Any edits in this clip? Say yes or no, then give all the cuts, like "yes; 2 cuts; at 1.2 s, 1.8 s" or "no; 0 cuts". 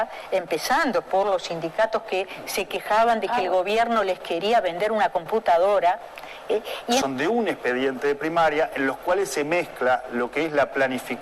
yes; 1 cut; at 7.0 s